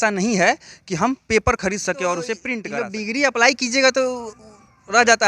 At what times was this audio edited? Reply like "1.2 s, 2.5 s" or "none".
2.6 s